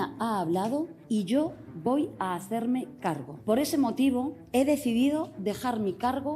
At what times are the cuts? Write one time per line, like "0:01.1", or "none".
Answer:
0:01.0
0:03.3
0:04.4